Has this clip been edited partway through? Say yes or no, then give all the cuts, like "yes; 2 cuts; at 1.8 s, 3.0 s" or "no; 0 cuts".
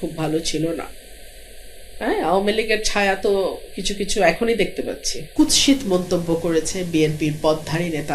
yes; 1 cut; at 5.2 s